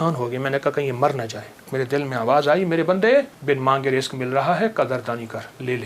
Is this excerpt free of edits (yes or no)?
no